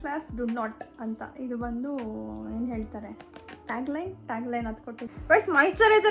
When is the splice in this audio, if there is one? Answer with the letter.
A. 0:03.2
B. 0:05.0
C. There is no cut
B